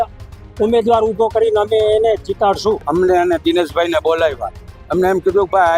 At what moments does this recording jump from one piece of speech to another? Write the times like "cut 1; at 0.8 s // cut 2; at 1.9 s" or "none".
cut 1; at 2.8 s